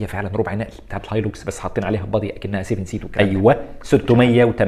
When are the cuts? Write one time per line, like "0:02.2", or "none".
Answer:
0:03.0

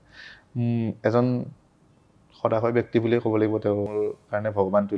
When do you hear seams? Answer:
0:03.9

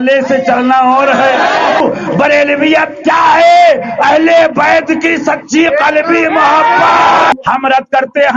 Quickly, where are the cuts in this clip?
0:01.8
0:07.3

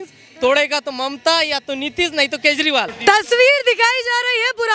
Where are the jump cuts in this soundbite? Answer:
0:02.9

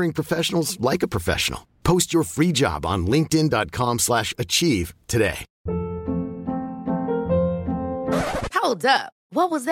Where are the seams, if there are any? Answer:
0:05.5

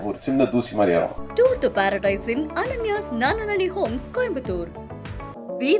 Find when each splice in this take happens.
0:01.2

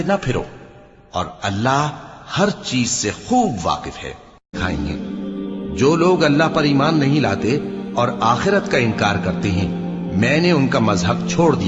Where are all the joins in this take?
0:04.5

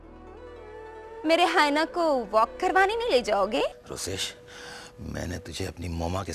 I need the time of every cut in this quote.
0:03.8

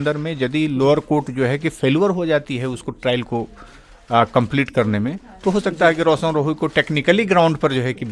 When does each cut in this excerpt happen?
none

